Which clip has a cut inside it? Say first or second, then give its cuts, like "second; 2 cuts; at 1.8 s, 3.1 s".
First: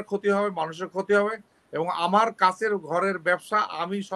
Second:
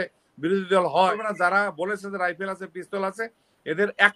second; 1 cut; at 1.1 s